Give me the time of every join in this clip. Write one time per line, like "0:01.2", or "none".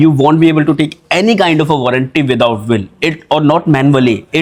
none